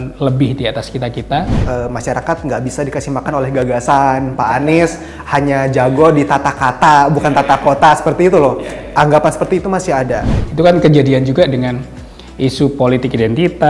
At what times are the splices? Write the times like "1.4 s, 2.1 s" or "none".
1.6 s, 10.3 s